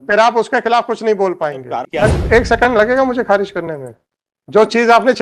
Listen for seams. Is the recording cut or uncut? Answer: cut